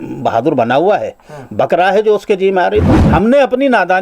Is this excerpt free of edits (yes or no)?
no